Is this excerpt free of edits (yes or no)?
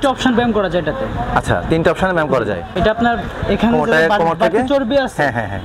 no